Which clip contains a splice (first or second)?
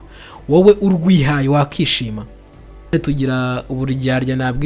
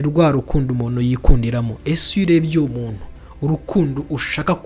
first